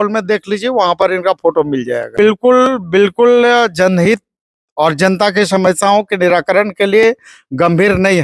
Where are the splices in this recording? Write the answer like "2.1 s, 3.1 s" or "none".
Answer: none